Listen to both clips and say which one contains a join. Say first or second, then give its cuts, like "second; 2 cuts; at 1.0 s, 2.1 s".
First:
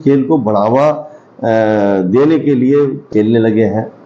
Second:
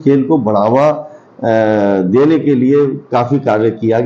first; 1 cut; at 3.0 s